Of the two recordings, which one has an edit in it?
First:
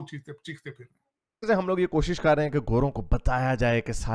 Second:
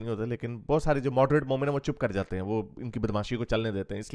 first; 1 cut; at 1.5 s

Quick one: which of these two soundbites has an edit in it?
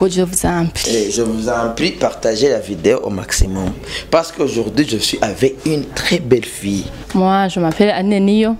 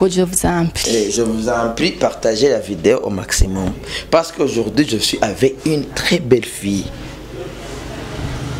first; 1 cut; at 7.0 s

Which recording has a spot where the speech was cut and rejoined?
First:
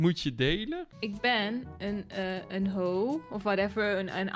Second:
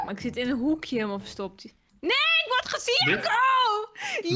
first; 1 cut; at 0.9 s

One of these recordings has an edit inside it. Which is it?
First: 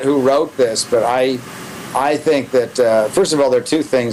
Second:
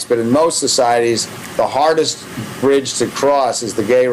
second; 1 cut; at 1.9 s

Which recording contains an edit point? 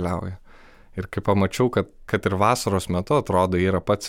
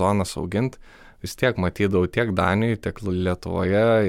first; 1 cut; at 2.0 s

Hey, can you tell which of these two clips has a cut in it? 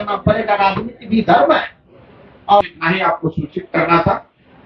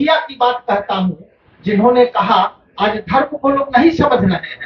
first; 1 cut; at 2.6 s

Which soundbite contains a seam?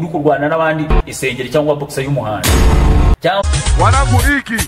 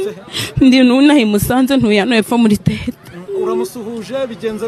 first; 1 cut; at 3.4 s

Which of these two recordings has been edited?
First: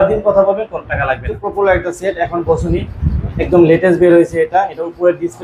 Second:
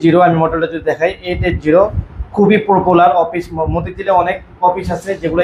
first; 1 cut; at 1.4 s

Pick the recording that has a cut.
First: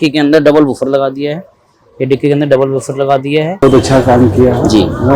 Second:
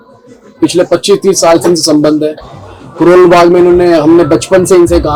first; 1 cut; at 3.6 s

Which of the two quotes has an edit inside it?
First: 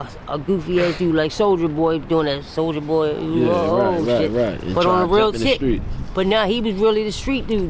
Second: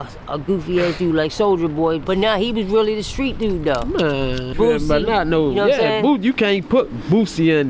second; 2 cuts; at 2.0 s, 4.5 s

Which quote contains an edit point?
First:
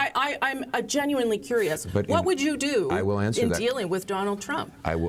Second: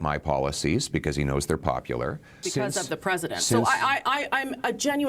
second; 1 cut; at 2.4 s

